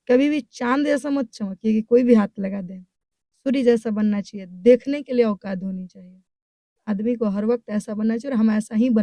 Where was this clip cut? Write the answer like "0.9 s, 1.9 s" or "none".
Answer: none